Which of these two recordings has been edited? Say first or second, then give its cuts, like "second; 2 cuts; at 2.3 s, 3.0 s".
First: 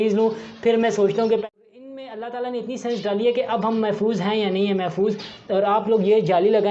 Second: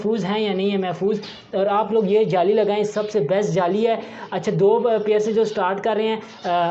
first; 1 cut; at 1.4 s